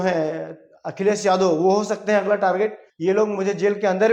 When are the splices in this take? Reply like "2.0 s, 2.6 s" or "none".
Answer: 2.9 s